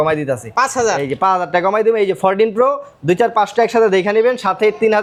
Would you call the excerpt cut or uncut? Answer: uncut